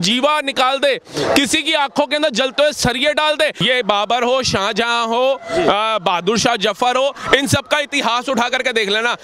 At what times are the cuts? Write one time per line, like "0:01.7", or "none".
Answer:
0:03.6